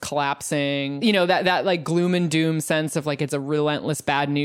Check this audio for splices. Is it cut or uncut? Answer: cut